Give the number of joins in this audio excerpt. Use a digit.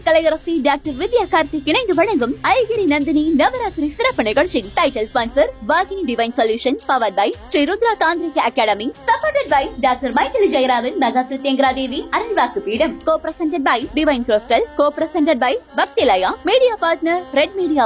0